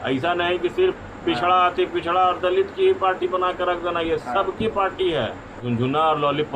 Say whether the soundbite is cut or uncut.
cut